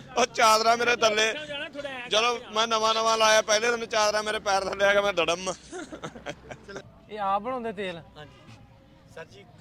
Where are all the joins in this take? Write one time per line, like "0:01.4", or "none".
0:06.8